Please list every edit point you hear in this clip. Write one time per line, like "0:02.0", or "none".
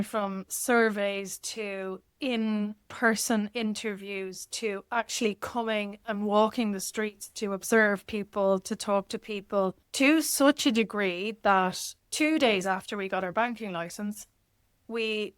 0:09.8
0:12.0